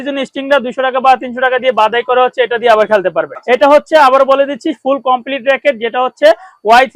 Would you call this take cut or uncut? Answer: cut